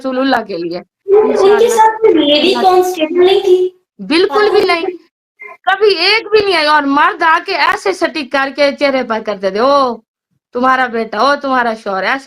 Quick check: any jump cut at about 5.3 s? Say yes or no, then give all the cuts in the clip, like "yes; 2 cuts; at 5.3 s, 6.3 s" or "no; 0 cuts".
no; 2 cuts; at 0.9 s, 3.9 s